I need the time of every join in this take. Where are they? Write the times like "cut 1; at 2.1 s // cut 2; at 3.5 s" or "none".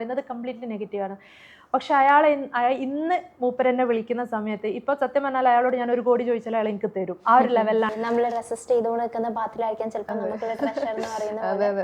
cut 1; at 7.9 s